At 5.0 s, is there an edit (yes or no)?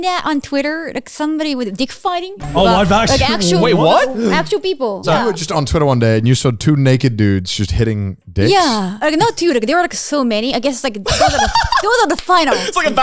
yes